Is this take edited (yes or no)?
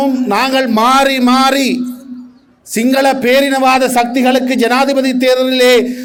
no